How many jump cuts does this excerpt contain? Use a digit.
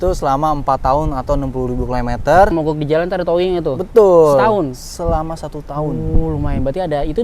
1